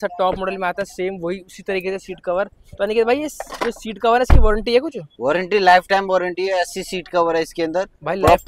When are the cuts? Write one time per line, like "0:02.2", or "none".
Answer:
none